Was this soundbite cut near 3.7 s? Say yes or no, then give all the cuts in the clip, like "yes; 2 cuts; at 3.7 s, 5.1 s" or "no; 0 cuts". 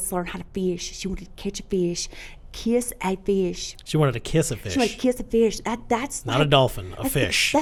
no; 0 cuts